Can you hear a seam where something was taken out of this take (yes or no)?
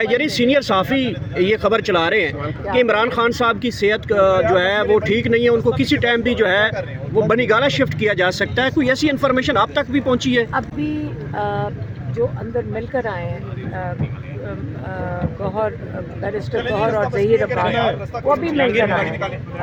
no